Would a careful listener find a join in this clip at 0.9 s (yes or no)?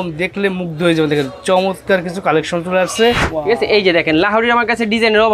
no